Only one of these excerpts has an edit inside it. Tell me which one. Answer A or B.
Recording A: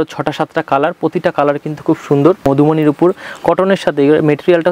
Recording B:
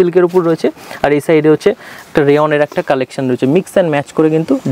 A